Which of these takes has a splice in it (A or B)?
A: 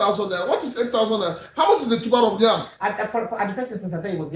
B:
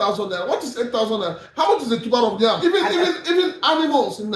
B